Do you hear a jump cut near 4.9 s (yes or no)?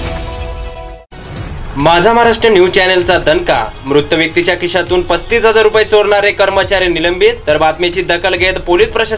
no